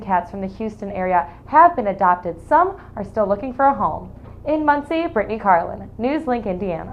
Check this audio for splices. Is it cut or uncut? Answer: uncut